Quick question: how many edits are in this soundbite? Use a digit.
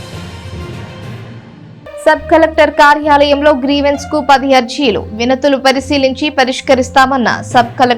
1